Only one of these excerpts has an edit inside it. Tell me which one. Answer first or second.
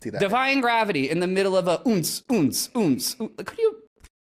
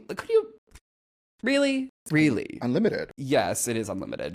second